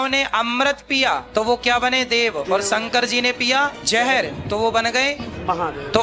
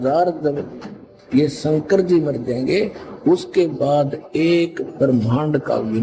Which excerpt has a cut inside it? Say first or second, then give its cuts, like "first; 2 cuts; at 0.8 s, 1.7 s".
first; 2 cuts; at 1.2 s, 3.8 s